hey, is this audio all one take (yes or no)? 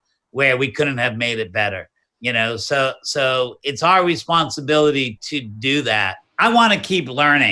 no